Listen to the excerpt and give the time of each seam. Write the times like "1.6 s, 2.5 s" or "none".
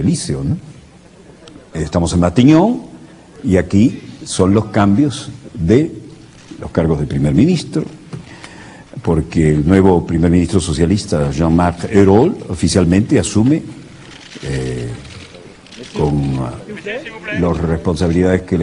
none